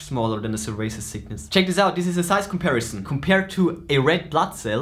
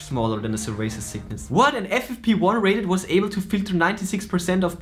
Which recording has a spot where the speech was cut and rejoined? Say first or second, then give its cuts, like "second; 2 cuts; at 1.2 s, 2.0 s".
first; 2 cuts; at 1.4 s, 3.0 s